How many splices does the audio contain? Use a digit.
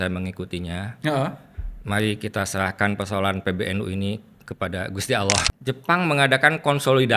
1